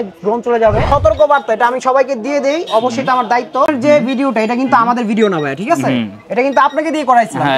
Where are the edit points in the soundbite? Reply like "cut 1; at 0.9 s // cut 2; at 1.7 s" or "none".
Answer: cut 1; at 0.8 s // cut 2; at 3.7 s